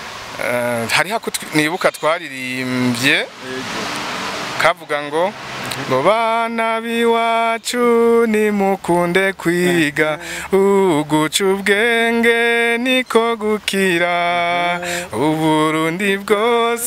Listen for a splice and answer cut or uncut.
uncut